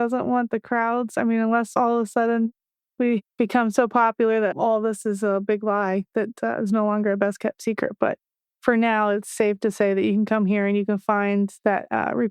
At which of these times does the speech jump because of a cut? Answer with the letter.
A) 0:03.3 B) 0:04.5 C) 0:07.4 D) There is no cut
B